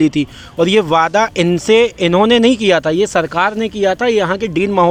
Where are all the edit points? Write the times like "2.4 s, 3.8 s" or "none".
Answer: none